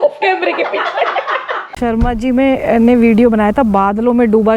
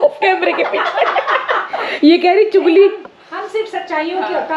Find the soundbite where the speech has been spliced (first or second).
first